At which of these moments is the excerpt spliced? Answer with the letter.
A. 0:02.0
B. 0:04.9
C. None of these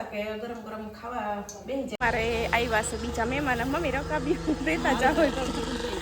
A